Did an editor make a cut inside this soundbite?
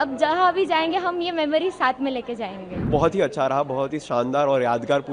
yes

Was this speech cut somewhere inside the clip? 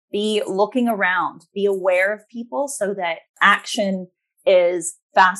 no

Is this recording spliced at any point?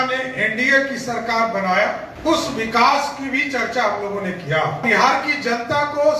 yes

